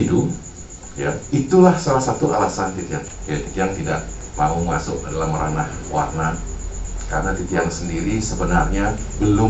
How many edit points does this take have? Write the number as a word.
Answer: one